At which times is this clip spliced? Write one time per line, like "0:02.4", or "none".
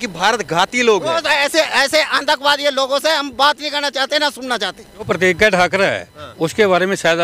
0:05.1